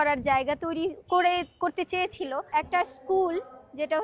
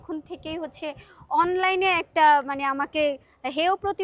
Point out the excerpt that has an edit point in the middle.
first; 1 cut; at 2.5 s

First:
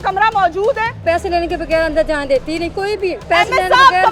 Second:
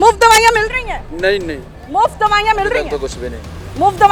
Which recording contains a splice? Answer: first; 2 cuts; at 1.0 s, 3.2 s

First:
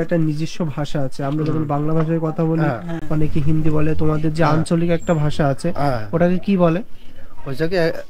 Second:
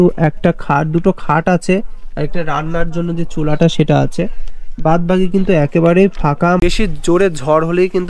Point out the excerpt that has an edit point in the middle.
second; 1 cut; at 6.6 s

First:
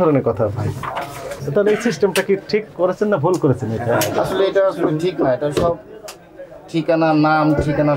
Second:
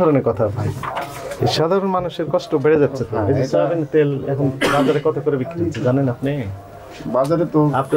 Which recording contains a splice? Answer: second; 1 cut; at 1.2 s

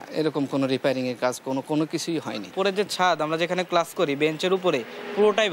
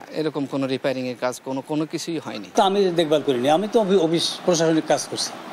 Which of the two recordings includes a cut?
first; 1 cut; at 2.4 s

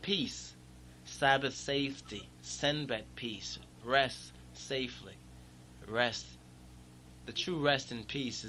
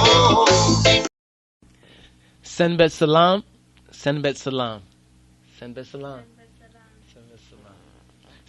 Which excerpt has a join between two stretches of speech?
second; 1 cut; at 1.0 s

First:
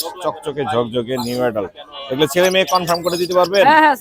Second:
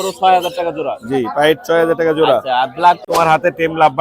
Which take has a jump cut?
second; 1 cut; at 3.0 s

